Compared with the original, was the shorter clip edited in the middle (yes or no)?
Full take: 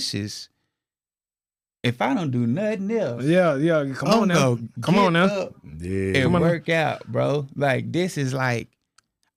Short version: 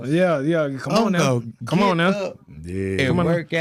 no